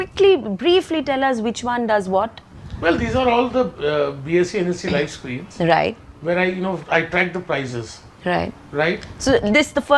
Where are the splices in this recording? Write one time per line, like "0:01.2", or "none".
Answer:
none